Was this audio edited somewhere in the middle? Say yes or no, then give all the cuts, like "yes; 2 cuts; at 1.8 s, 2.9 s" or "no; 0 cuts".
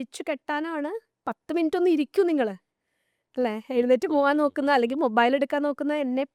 no; 0 cuts